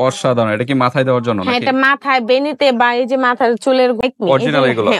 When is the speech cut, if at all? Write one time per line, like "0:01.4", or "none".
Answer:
0:04.0

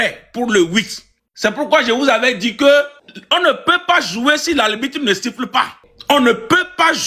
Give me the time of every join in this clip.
none

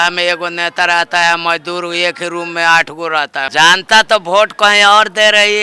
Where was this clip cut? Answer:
0:03.5

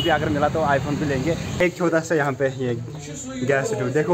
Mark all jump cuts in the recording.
0:01.6

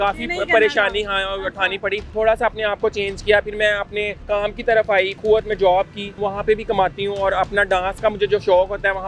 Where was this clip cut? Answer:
0:02.1
0:04.2
0:05.2
0:06.2

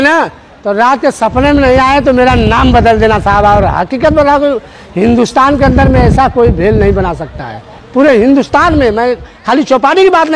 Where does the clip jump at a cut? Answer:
none

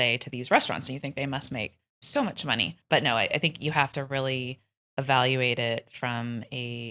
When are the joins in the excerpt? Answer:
0:02.8

